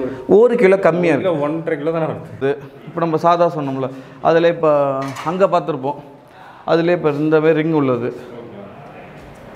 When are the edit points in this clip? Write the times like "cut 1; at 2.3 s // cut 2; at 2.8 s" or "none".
cut 1; at 2.4 s